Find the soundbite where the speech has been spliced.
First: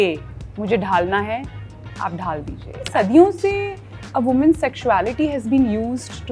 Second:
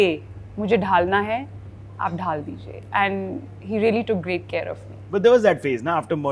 first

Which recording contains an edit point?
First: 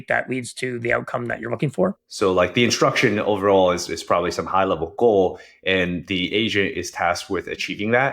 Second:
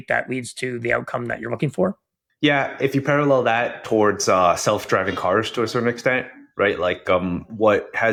first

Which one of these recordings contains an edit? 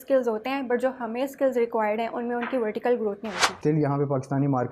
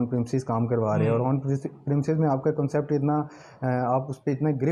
first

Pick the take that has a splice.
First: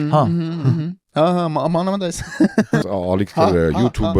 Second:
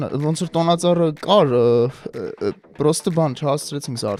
first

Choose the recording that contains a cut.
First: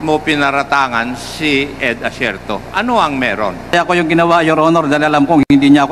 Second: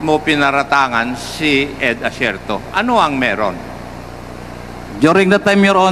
first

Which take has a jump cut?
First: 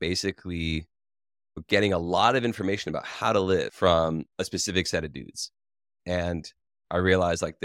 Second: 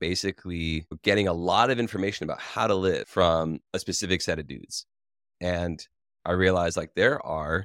second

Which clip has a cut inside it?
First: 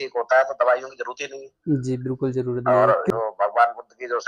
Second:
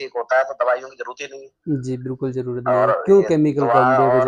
first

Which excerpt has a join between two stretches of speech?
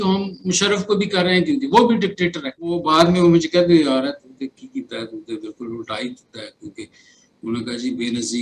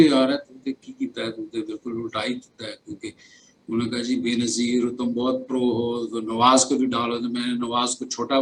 first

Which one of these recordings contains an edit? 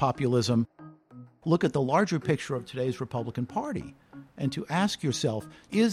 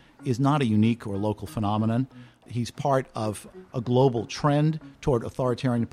first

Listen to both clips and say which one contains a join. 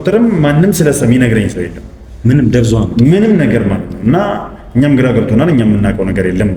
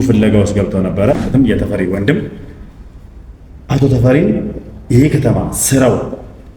second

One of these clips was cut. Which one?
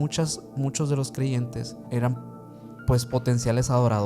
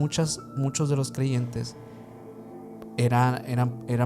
first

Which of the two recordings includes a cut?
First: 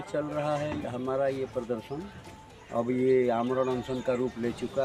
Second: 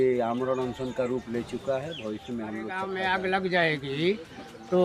second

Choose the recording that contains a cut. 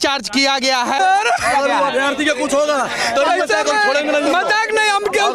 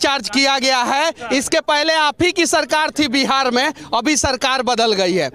first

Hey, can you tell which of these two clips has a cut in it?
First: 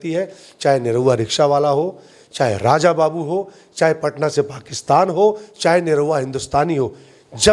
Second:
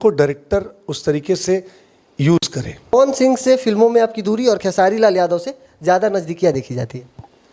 second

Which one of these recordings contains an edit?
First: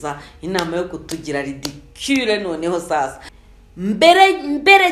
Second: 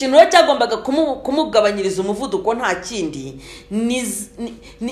first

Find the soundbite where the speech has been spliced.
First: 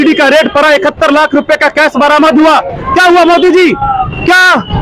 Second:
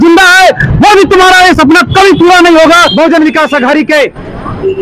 second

